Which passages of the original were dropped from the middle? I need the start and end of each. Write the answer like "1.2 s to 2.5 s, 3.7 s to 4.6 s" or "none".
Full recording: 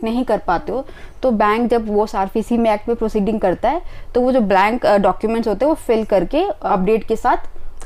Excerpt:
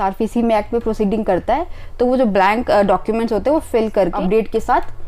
6.3 s to 6.7 s